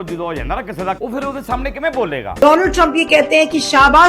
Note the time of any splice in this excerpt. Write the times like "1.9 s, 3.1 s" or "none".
1.0 s, 2.4 s